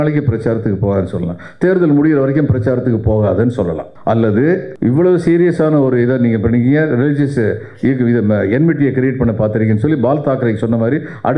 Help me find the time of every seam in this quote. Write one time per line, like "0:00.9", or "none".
0:03.9
0:04.7